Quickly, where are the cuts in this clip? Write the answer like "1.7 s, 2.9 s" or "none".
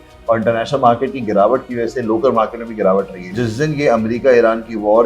3.3 s

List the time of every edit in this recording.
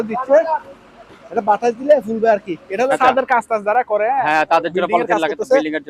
2.9 s

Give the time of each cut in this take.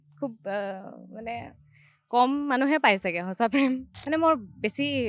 3.9 s

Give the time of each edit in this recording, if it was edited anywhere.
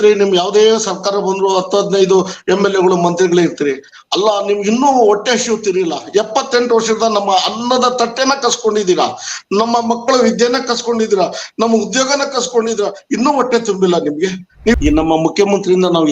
14.8 s

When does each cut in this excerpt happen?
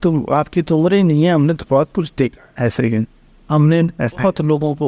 none

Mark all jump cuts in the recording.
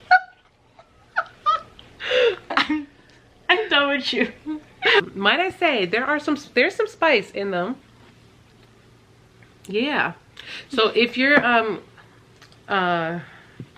2.4 s, 5.0 s

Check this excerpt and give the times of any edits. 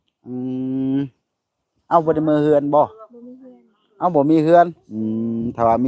4.8 s

